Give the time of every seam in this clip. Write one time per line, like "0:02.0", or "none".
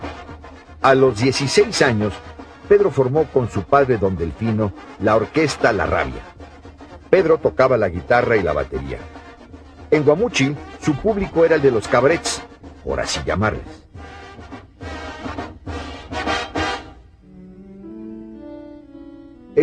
none